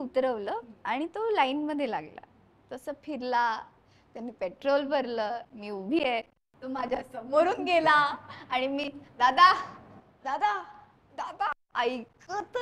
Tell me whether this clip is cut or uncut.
uncut